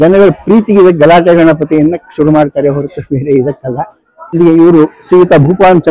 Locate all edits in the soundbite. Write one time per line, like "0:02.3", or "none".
0:04.4